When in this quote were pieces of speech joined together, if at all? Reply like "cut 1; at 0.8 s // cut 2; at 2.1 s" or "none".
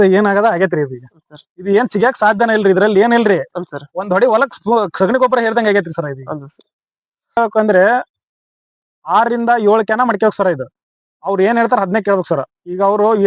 cut 1; at 7.4 s